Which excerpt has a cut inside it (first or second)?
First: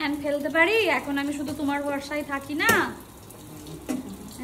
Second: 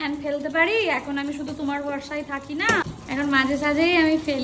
second